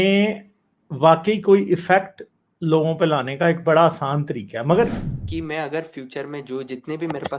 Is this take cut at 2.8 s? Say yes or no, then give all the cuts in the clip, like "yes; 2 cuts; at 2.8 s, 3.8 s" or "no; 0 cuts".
no; 1 cut; at 5.0 s